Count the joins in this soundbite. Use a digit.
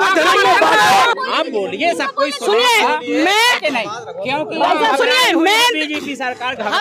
1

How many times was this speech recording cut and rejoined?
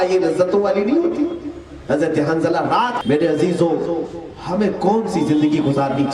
1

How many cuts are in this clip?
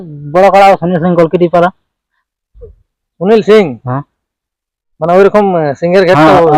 0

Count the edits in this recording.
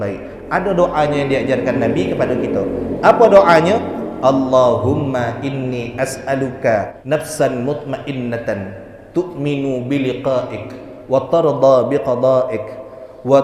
1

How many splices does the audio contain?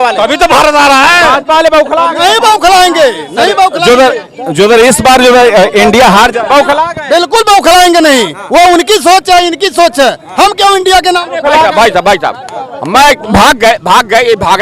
0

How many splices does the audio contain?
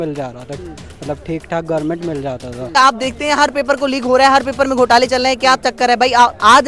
1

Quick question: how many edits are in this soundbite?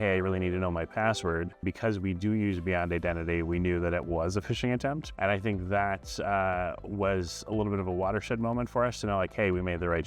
2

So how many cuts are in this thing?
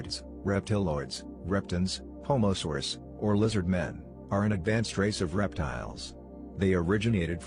0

